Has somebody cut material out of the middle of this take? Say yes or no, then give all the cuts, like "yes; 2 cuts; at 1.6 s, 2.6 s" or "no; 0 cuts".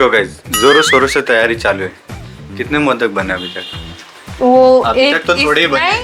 no; 0 cuts